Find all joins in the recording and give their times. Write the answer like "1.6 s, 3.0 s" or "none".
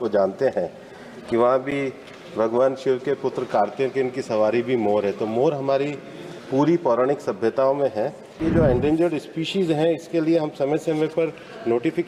8.4 s